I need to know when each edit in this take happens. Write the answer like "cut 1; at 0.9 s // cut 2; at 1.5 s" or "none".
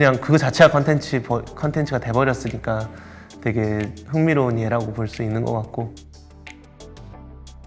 none